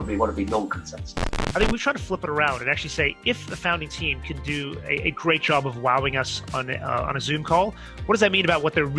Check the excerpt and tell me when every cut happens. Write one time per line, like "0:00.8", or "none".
0:01.4

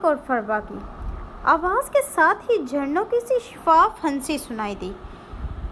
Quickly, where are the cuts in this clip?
none

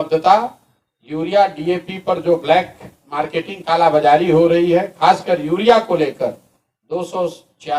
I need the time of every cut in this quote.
none

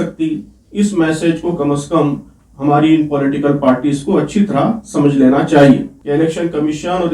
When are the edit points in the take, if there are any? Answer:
0:06.0

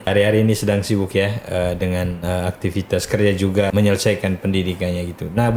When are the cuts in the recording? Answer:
none

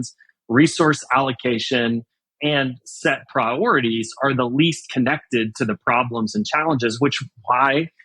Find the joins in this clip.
0:02.3

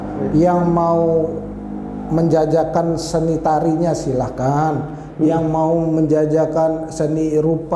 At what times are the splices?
none

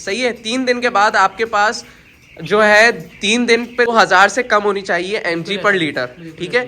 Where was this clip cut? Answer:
0:03.9

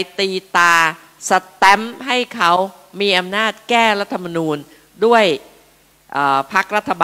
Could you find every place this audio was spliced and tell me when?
none

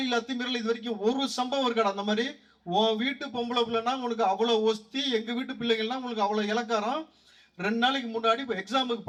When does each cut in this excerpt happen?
none

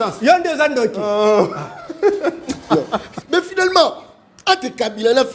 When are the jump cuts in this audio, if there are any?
0:03.1

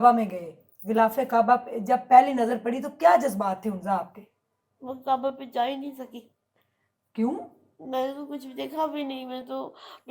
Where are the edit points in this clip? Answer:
none

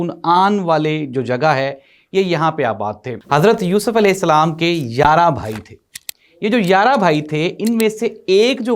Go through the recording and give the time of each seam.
0:03.1

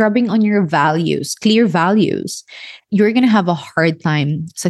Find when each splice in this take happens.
0:02.8

